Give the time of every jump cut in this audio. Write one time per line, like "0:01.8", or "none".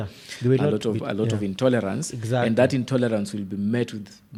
none